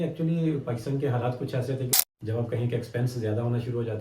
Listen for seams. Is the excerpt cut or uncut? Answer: cut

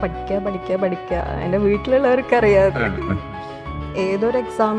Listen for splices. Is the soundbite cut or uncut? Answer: cut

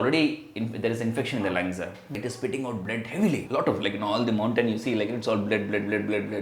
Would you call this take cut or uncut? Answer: cut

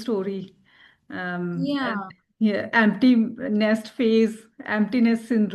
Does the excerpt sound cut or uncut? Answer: uncut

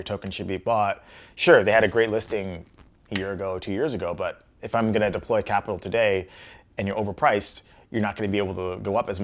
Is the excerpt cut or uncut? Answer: uncut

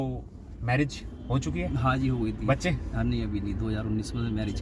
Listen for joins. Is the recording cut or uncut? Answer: uncut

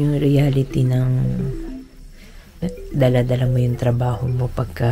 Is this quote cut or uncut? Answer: uncut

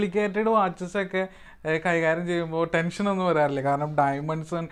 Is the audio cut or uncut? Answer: uncut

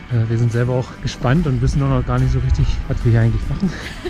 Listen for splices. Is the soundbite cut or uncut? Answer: cut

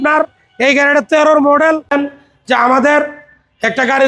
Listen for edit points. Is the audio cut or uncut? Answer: cut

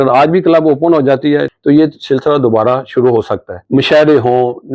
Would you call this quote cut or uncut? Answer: cut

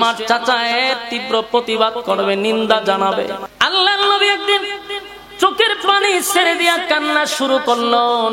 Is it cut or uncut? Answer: cut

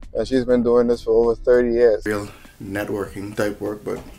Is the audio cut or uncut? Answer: cut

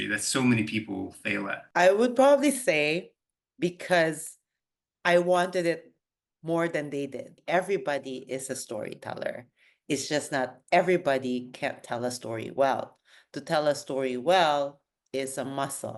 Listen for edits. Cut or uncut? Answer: cut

